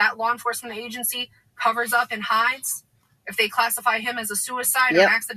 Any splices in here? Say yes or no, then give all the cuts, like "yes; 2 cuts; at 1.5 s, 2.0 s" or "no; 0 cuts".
yes; 1 cut; at 3.6 s